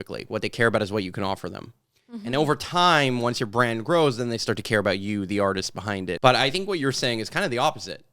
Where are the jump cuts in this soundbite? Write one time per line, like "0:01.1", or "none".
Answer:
0:06.2